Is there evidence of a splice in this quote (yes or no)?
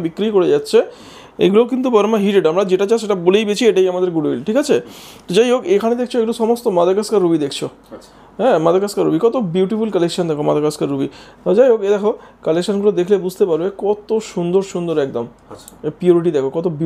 no